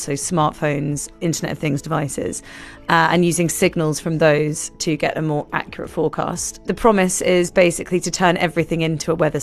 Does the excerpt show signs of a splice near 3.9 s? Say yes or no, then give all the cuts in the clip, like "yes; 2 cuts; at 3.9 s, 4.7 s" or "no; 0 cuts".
no; 1 cut; at 6.7 s